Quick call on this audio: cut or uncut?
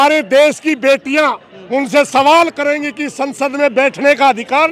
uncut